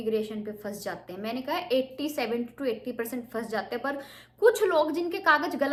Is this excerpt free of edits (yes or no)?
yes